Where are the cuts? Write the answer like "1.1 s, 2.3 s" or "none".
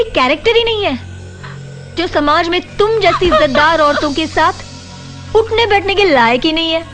none